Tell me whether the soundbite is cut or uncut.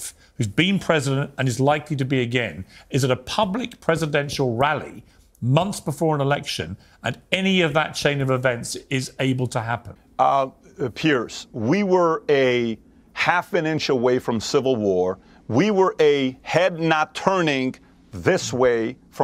cut